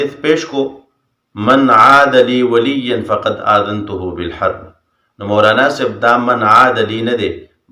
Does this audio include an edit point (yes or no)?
yes